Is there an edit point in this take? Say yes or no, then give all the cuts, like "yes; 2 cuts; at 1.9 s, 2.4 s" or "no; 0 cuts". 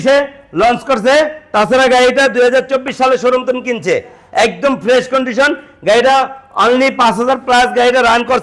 no; 0 cuts